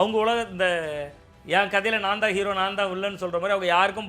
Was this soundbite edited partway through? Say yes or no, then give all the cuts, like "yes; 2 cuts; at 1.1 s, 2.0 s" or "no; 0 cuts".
no; 0 cuts